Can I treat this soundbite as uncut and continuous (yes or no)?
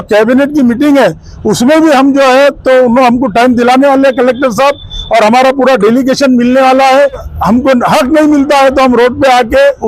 no